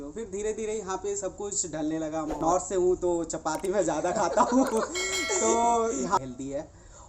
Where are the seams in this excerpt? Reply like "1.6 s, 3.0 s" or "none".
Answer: 2.4 s, 6.2 s